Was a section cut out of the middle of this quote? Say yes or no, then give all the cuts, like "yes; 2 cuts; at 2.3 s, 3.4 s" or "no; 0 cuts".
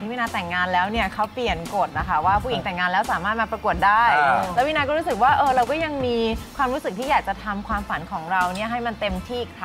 no; 0 cuts